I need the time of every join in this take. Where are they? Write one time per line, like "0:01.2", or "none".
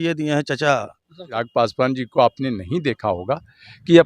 0:01.3